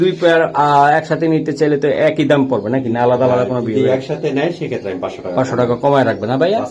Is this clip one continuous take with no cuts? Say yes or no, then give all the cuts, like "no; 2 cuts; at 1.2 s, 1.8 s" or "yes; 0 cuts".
yes; 0 cuts